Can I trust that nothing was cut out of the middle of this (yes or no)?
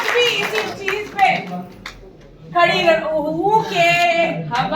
yes